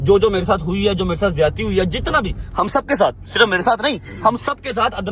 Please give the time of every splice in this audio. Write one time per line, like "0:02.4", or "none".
none